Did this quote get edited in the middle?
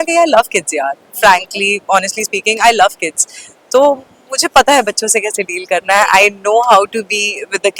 no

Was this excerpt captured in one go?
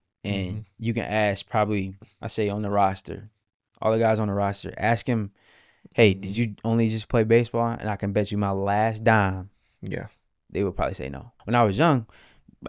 no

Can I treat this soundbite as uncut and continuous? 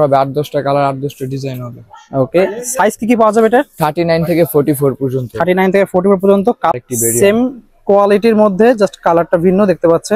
no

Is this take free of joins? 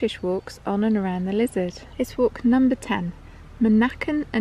no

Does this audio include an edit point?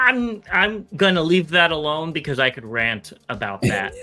no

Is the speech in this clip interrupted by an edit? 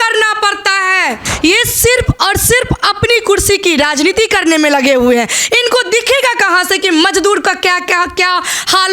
yes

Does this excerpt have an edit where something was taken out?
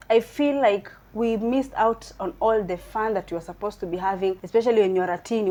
no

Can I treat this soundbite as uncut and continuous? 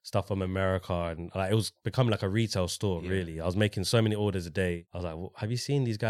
no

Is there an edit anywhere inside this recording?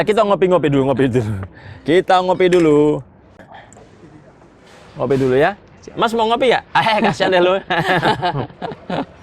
yes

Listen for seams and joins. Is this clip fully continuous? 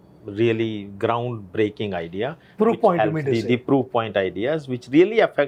yes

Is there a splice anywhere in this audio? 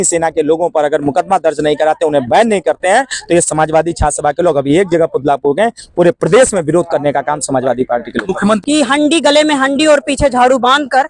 yes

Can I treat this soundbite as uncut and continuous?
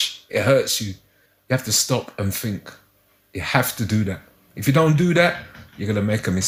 yes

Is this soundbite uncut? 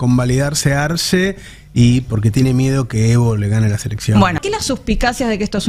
no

